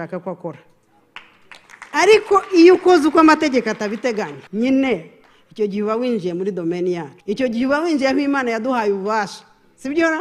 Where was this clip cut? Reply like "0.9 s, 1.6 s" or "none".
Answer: 4.4 s, 7.1 s